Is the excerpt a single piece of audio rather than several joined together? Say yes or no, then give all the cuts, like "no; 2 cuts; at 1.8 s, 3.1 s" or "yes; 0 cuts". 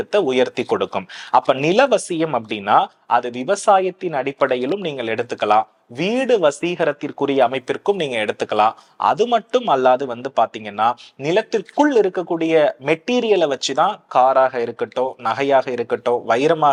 yes; 0 cuts